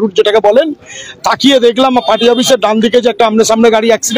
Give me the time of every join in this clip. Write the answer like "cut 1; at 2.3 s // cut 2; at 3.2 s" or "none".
none